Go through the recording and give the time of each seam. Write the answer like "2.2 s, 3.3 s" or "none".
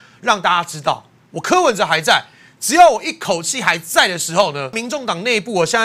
4.8 s